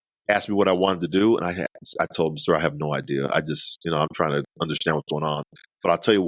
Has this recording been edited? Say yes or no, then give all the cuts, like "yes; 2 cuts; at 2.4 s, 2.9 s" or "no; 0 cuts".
no; 0 cuts